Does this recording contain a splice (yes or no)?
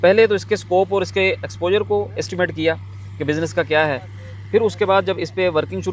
no